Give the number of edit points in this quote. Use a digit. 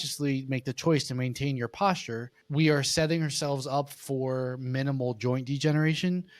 1